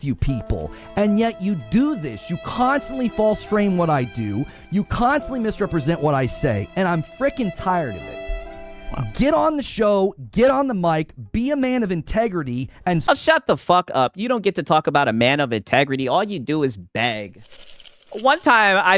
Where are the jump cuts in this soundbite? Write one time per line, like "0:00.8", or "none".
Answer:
none